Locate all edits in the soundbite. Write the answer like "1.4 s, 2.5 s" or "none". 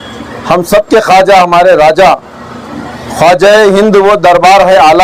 none